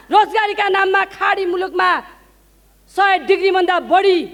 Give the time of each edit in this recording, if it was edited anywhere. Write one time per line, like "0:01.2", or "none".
none